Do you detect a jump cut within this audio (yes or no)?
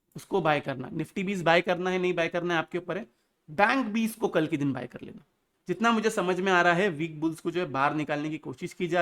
yes